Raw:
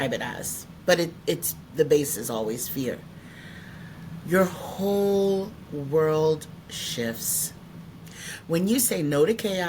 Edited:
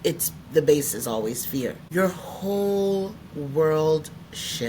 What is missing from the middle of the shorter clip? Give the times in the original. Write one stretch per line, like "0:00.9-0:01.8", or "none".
0:03.0-0:04.2